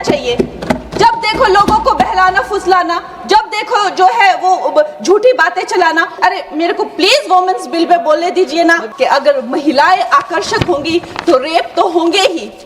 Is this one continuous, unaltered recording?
no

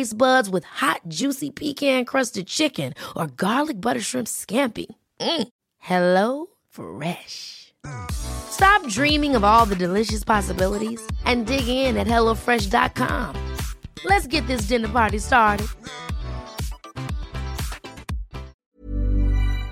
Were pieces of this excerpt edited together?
yes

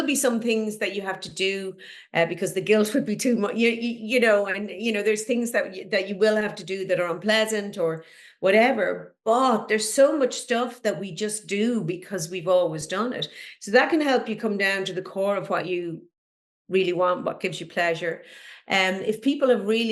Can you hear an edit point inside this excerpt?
no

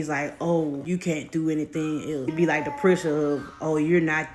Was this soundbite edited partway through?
yes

